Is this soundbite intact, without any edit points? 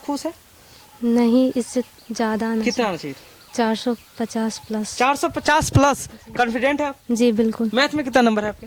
yes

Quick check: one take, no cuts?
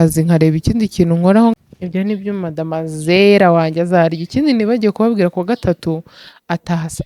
no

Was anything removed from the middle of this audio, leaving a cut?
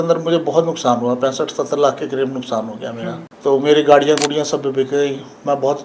yes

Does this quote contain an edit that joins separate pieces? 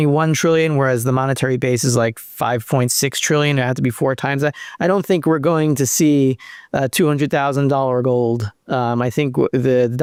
no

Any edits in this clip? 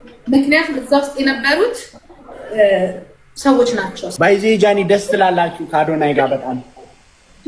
yes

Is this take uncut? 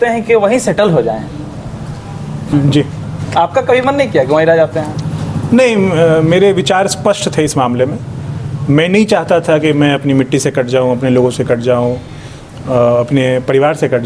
no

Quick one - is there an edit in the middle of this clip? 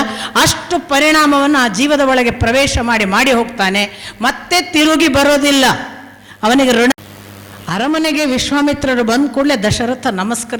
yes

